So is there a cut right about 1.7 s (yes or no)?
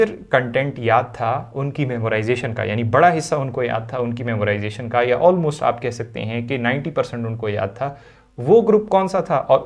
no